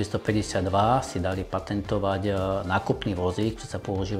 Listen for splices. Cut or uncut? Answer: uncut